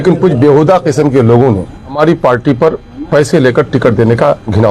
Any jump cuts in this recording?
no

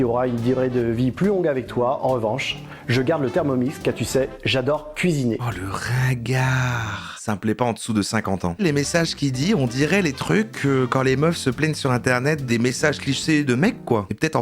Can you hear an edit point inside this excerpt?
yes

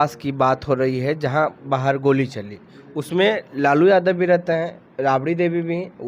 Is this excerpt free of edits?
no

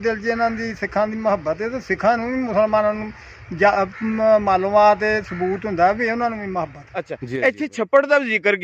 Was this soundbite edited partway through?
yes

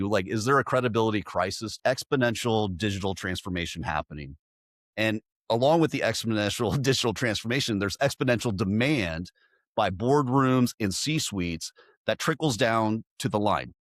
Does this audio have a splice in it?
yes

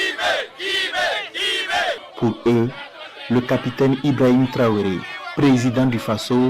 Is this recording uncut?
no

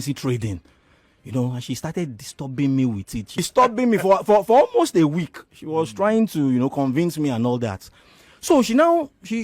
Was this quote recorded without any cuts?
no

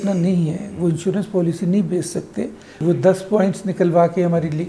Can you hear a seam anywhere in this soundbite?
yes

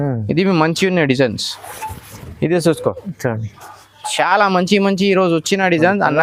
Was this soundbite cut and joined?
no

